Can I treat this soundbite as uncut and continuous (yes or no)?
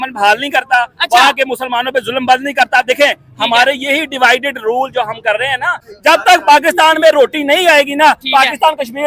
no